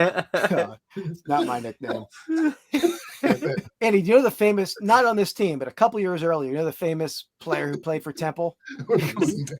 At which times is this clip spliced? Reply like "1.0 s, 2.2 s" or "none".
3.7 s